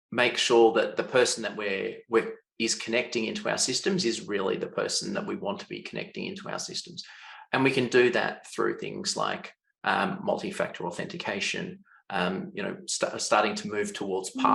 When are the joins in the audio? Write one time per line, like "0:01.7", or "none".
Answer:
none